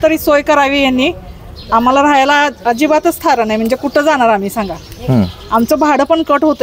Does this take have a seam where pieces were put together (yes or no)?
no